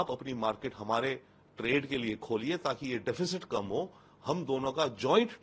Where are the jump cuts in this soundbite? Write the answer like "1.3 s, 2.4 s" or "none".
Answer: none

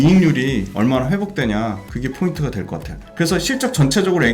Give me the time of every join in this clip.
1.9 s

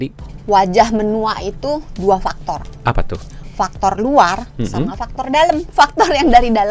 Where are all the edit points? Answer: 5.7 s

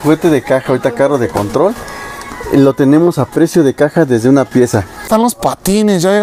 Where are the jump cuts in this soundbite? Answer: 5.1 s

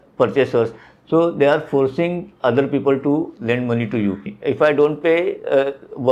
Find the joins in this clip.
4.2 s

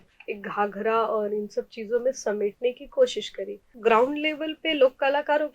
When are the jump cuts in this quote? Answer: 3.6 s

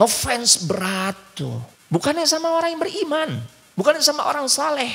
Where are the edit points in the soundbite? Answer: 1.7 s

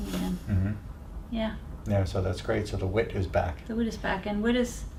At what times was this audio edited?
none

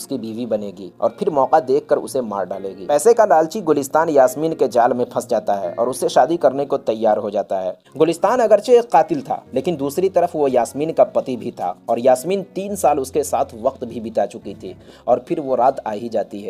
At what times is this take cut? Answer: 2.7 s, 7.8 s, 14.9 s

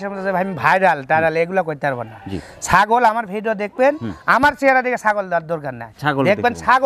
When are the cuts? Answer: none

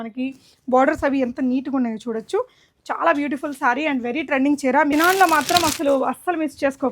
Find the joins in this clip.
4.9 s

